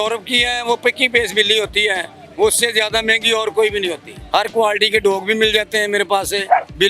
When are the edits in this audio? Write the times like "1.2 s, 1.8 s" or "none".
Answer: 4.1 s